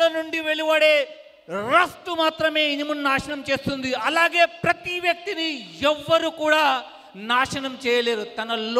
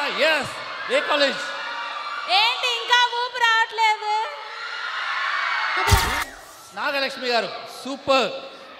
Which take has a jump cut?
second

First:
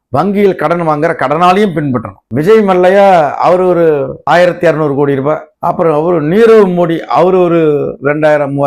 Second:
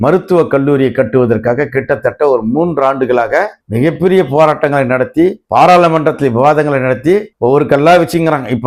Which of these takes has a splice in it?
first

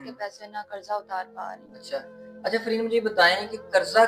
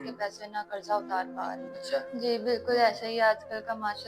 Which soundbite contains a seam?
second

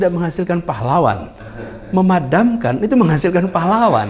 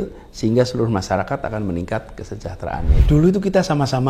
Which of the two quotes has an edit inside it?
second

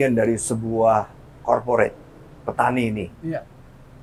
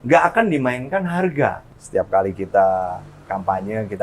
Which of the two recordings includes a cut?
second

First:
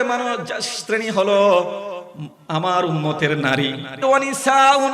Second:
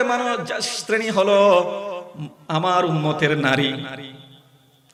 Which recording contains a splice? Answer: first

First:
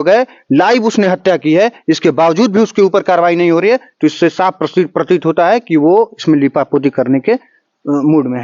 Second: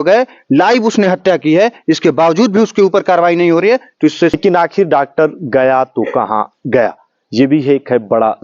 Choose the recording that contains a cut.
second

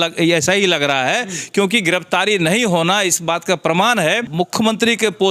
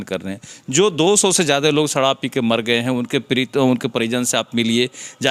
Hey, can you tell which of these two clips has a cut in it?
first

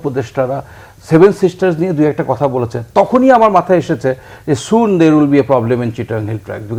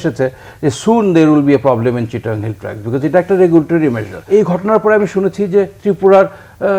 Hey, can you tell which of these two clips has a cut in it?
second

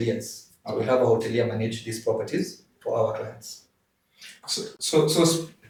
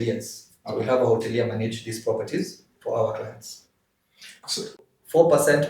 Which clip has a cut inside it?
second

